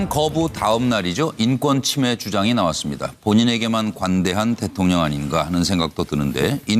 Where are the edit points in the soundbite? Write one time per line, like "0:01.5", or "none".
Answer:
none